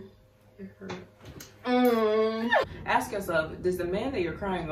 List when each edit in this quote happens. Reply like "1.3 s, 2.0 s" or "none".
2.6 s